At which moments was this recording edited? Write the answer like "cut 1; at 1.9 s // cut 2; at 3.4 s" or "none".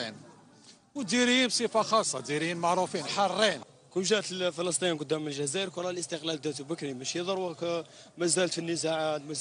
cut 1; at 1.8 s